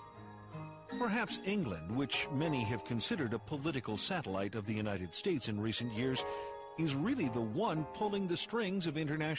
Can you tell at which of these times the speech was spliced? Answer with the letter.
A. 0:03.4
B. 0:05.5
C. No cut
A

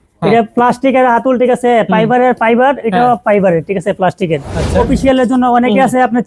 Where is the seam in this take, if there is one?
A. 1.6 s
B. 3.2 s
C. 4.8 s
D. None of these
C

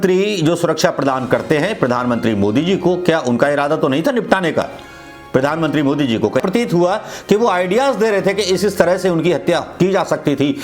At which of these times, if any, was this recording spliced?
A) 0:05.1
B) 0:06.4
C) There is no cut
B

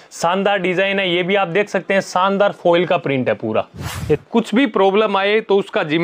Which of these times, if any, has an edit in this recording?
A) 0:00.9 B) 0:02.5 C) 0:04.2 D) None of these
C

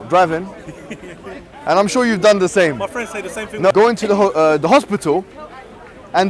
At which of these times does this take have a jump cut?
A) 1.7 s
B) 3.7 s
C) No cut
B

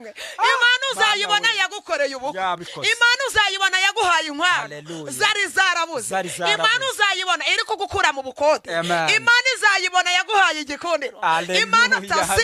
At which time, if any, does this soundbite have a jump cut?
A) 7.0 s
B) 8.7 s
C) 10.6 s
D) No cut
D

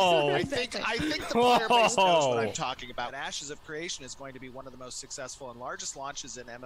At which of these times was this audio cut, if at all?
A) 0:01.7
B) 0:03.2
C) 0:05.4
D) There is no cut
B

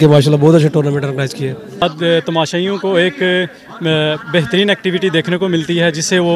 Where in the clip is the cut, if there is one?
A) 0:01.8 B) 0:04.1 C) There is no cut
A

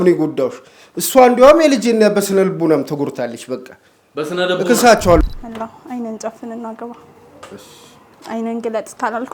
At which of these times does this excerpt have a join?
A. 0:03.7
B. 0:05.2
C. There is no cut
B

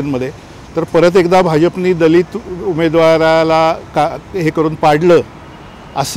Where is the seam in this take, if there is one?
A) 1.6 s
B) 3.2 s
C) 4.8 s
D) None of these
D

